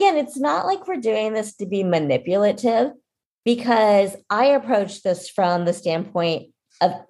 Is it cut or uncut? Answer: uncut